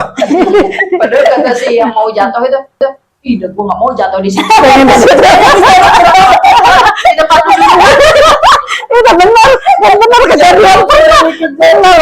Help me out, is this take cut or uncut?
uncut